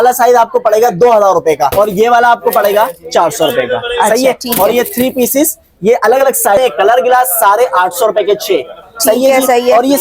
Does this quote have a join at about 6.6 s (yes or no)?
yes